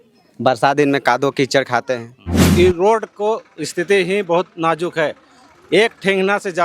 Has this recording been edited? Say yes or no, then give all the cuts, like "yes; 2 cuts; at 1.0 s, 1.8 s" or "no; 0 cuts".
yes; 1 cut; at 2.4 s